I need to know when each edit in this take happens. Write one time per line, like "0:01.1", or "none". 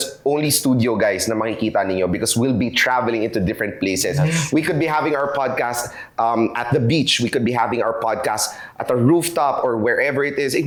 none